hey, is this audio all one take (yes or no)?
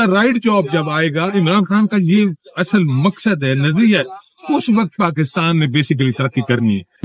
yes